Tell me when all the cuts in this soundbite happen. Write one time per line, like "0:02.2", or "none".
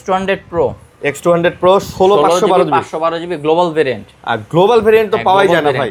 none